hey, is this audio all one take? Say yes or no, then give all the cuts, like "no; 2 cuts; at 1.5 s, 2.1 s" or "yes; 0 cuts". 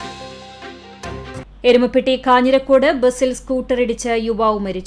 yes; 0 cuts